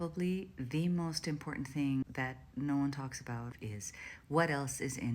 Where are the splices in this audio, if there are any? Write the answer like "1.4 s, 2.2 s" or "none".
2.0 s, 3.5 s

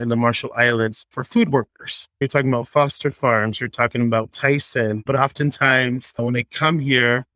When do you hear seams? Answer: 5.0 s

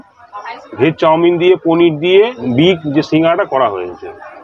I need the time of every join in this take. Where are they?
2.4 s

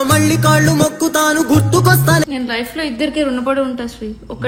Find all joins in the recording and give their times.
2.4 s

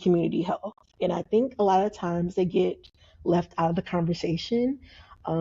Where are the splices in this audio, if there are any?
none

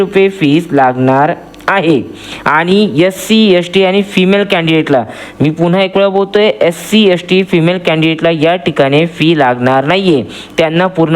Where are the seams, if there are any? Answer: none

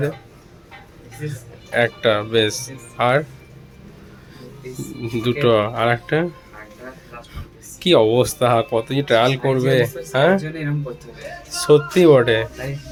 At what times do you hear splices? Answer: none

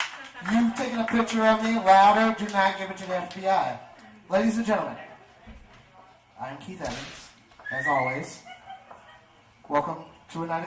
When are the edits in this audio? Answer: 5.2 s

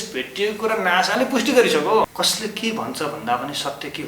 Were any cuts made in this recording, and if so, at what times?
2.1 s

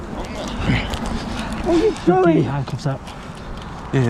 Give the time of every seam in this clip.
none

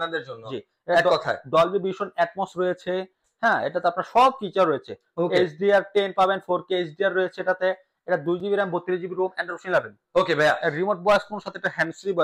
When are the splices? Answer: none

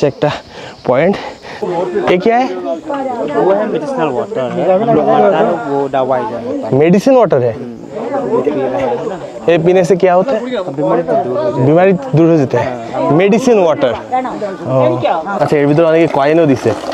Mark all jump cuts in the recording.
1.7 s, 15.3 s

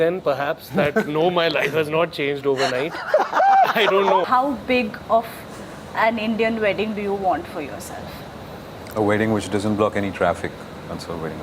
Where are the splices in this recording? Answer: 4.2 s

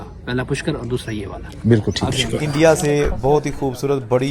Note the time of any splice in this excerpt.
2.4 s

